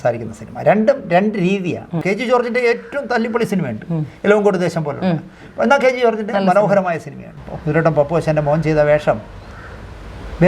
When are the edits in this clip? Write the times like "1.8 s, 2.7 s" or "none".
2.0 s, 7.4 s